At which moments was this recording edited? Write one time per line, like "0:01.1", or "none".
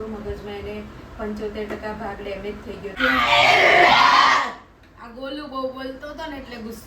0:02.9